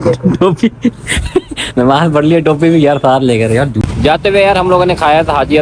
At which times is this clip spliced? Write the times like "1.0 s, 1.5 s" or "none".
3.9 s

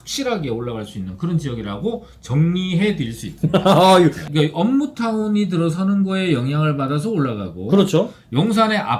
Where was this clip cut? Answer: 4.2 s

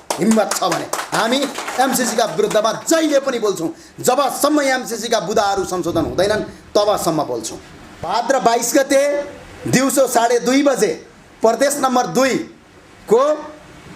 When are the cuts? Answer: 8.1 s

